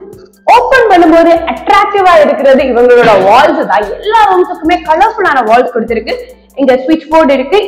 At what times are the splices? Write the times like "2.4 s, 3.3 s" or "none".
none